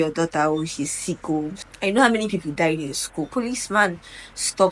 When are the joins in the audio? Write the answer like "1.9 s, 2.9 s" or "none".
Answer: 1.6 s, 3.3 s